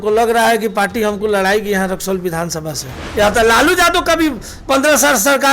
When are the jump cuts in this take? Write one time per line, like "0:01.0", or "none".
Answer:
0:03.0